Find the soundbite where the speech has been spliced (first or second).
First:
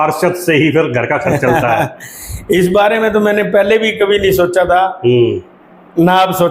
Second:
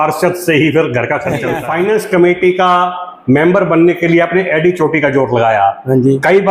second